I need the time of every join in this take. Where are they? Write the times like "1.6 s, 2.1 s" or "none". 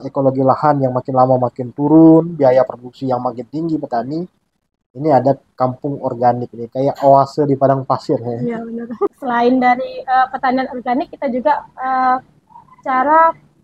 9.1 s